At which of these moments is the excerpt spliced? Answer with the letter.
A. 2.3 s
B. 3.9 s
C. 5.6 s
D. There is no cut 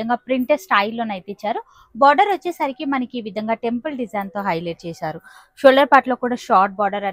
D